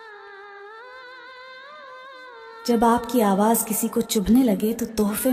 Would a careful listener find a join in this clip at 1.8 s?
yes; 1 cut; at 1.8 s

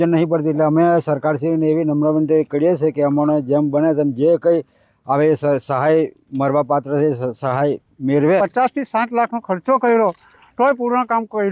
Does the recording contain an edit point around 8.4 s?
yes; 1 cut; at 8.4 s

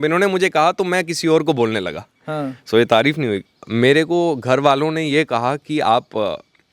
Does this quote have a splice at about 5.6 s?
no; 1 cut; at 3.4 s

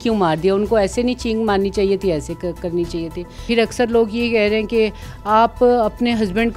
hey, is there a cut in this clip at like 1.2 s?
no; 1 cut; at 3.3 s

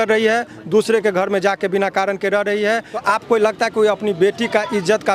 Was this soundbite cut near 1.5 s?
no; 1 cut; at 3.0 s

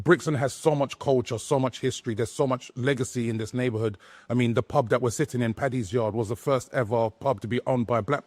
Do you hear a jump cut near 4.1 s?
no; 0 cuts

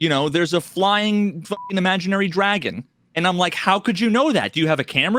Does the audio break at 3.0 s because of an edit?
no; 0 cuts

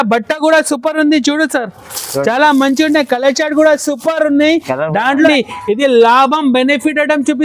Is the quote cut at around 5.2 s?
yes; 1 cut; at 5.2 s

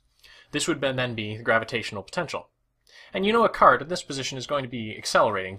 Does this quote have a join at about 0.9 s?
no; 1 cut; at 3.5 s

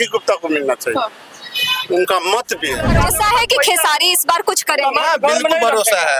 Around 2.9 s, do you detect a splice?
yes; 1 cut; at 2.9 s

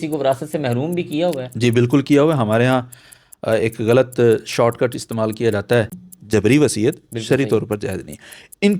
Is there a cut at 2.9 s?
no; 1 cut; at 6.0 s

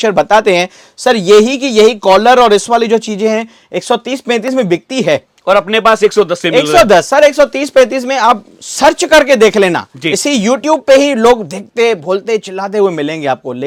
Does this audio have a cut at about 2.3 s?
no; 0 cuts

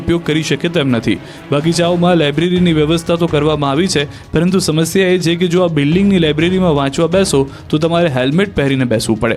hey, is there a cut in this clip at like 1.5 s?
no; 0 cuts

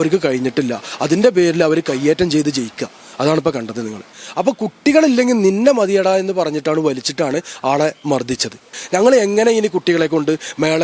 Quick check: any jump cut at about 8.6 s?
yes; 2 cuts; at 4.0 s, 8.6 s

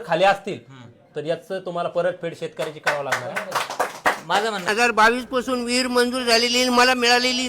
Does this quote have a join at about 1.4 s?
no; 1 cut; at 4.7 s

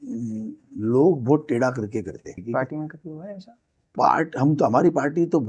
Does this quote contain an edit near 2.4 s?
yes; 1 cut; at 2.4 s

